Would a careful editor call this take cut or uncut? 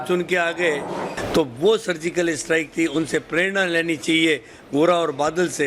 cut